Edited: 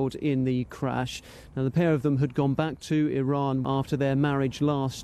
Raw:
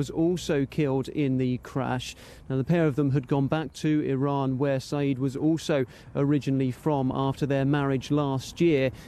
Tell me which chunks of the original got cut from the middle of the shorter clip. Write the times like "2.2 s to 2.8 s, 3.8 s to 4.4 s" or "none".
4.6 s to 7.1 s